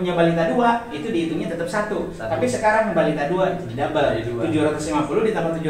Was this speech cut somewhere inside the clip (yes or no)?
no